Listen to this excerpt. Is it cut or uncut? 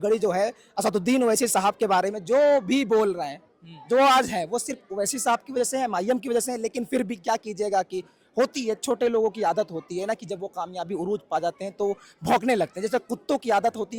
uncut